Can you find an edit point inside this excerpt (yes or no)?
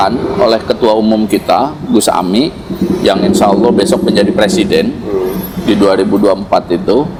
no